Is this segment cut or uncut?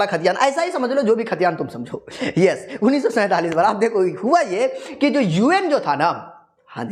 uncut